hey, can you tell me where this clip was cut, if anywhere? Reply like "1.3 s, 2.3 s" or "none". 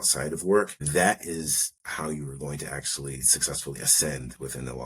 none